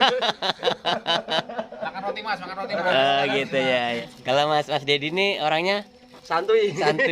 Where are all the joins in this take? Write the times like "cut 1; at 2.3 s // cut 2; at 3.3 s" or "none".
cut 1; at 4.0 s